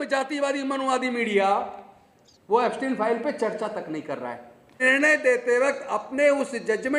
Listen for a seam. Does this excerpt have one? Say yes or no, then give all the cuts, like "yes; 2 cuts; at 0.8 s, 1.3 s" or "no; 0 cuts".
yes; 1 cut; at 4.8 s